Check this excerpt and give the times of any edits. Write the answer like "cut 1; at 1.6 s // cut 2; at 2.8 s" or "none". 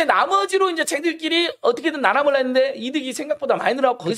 none